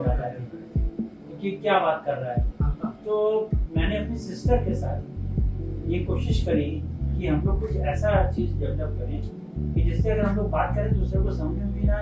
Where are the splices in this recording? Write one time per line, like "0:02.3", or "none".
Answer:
none